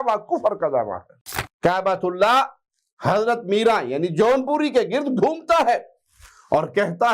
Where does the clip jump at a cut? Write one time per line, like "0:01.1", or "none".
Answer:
0:01.1